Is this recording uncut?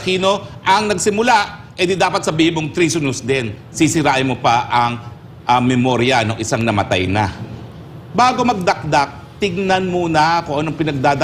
yes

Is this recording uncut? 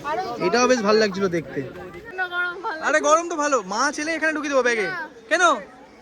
no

